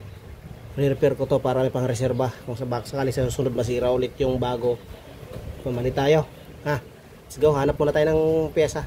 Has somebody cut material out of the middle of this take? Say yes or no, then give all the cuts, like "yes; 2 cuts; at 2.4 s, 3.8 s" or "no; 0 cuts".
no; 0 cuts